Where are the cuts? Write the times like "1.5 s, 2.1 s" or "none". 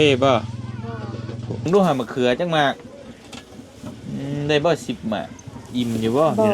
1.7 s